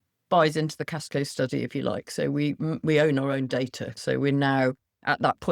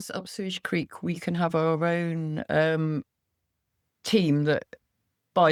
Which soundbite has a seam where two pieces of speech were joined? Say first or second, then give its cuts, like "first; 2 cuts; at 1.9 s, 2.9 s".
first; 1 cut; at 4.0 s